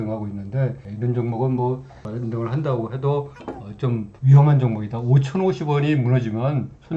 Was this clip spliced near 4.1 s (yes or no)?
yes